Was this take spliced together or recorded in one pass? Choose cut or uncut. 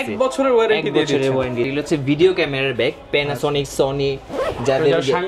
cut